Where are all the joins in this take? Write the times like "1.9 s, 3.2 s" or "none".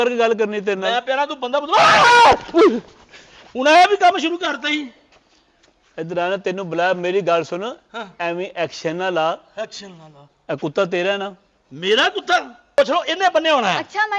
12.8 s